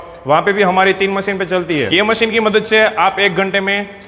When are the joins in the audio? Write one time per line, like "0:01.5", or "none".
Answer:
0:01.9